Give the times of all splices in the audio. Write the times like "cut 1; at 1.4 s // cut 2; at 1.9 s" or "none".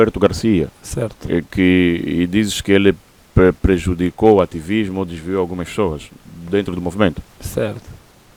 none